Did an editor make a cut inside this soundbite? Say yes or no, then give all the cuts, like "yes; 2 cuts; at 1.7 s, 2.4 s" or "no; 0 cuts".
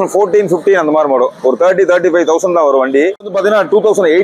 yes; 1 cut; at 3.1 s